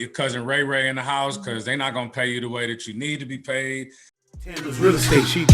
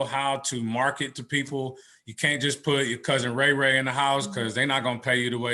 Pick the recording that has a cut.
first; 1 cut; at 4.2 s

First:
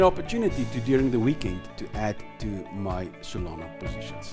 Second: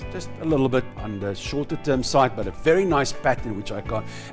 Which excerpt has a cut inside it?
second; 1 cut; at 0.9 s

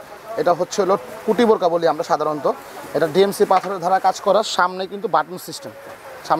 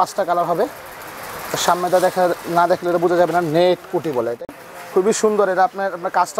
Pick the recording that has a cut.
second; 1 cut; at 4.4 s

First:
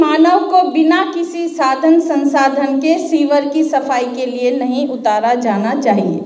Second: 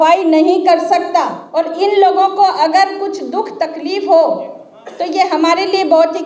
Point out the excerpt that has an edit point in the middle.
second; 1 cut; at 1.4 s

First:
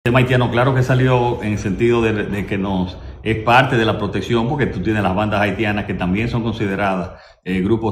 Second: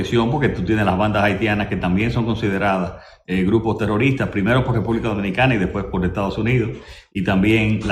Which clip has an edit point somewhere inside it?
first; 1 cut; at 1.0 s

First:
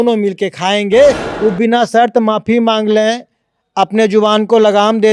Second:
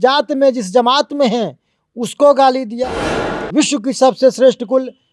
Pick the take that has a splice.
first; 1 cut; at 1.2 s

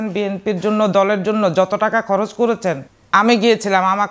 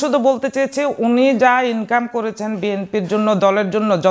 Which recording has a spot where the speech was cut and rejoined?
first; 1 cut; at 2.9 s

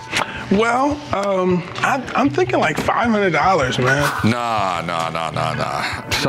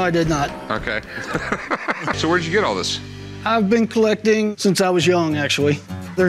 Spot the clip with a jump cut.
second; 1 cut; at 2.2 s

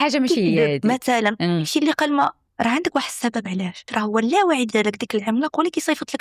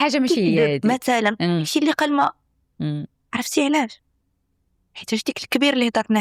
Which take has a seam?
first; 2 cuts; at 2.4 s, 3.9 s

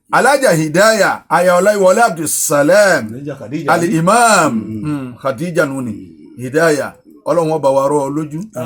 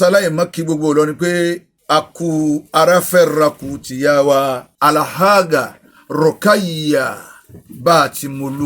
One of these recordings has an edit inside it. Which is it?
second; 2 cuts; at 1.7 s, 4.7 s

